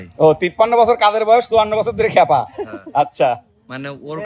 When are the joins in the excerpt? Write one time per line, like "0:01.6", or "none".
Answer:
none